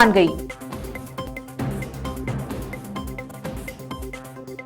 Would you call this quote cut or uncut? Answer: cut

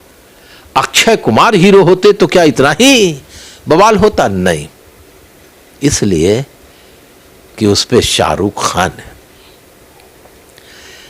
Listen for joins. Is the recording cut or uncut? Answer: uncut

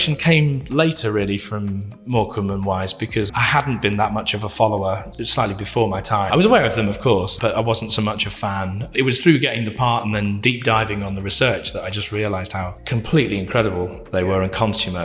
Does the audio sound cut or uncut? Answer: cut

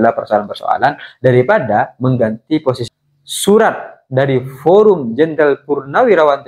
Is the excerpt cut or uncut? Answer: cut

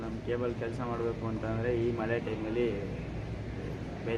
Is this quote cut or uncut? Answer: uncut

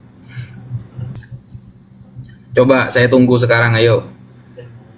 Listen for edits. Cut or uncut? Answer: cut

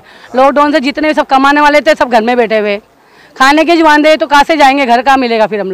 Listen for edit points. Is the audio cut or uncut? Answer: uncut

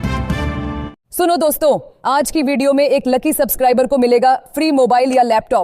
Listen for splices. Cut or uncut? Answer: cut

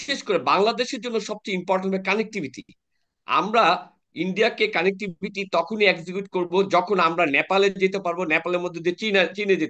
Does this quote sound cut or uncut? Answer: uncut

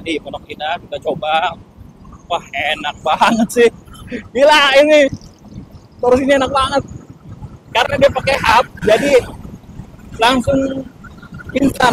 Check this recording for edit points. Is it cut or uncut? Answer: uncut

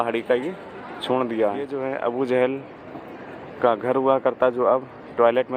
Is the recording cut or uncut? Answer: cut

